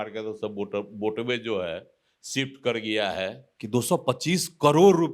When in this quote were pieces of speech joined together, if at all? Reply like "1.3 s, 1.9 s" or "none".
3.5 s